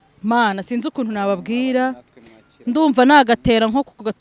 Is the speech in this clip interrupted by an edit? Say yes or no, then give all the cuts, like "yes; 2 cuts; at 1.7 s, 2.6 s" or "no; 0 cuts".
no; 0 cuts